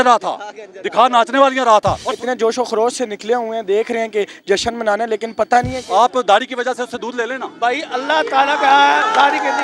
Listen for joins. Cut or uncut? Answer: cut